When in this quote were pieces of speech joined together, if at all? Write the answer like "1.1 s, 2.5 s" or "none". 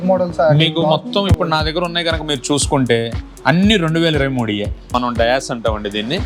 4.8 s